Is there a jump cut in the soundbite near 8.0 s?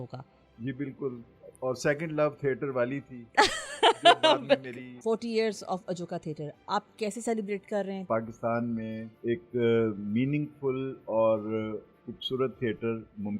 yes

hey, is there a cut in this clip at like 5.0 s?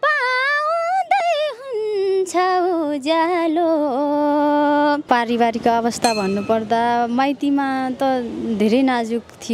yes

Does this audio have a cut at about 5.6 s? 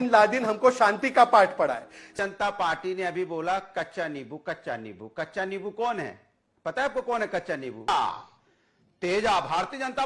no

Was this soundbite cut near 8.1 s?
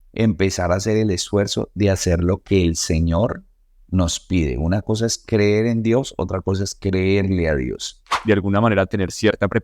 yes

